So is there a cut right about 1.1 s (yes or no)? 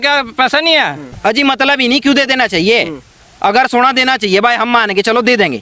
yes